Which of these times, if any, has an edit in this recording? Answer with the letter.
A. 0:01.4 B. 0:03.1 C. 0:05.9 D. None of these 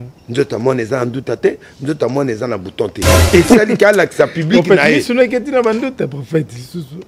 B